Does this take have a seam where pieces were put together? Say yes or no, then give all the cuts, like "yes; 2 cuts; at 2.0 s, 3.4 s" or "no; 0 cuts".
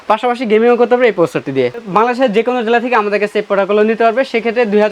yes; 1 cut; at 1.8 s